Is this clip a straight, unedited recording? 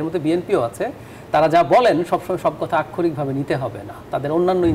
yes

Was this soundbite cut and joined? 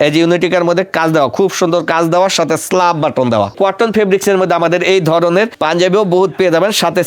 yes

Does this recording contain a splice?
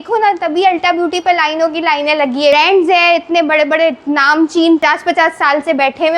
yes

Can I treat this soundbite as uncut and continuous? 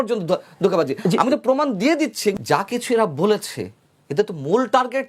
no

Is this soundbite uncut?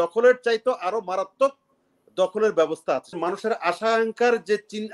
no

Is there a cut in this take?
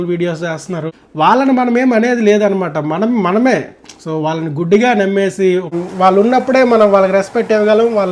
yes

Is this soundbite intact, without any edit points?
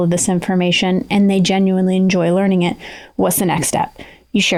yes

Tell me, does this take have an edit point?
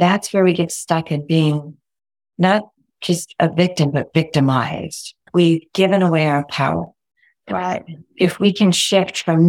yes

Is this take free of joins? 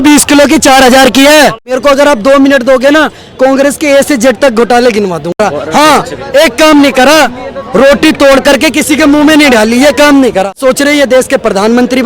no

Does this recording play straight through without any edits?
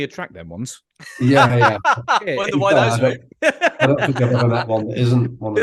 yes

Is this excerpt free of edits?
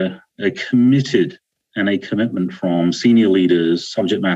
yes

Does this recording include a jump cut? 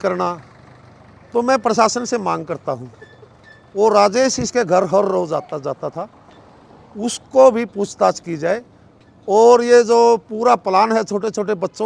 no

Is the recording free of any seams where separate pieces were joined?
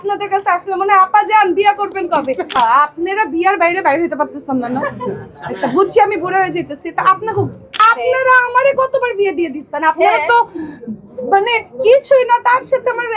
no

